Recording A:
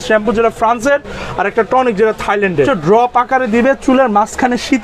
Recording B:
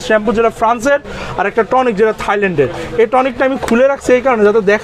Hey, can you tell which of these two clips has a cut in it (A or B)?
A